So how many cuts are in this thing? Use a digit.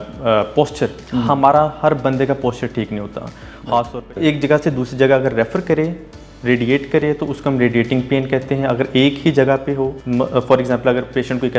3